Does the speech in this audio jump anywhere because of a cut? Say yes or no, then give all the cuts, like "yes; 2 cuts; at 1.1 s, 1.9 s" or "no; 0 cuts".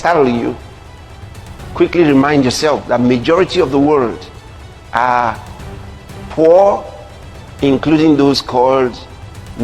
no; 0 cuts